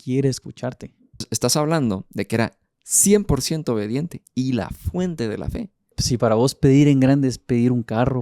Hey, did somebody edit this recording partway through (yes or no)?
yes